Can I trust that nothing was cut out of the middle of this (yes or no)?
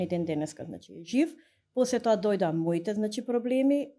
yes